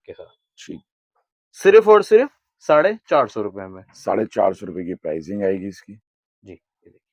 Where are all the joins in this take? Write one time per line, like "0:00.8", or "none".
none